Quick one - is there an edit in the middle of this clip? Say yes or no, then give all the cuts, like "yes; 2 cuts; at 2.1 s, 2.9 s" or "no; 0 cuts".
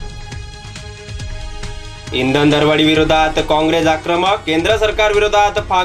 yes; 2 cuts; at 1.1 s, 2.1 s